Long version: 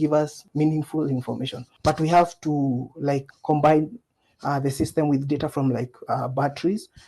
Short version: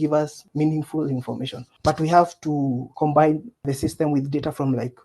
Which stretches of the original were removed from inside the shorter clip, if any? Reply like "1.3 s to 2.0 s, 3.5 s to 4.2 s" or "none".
2.9 s to 3.3 s, 4.1 s to 4.6 s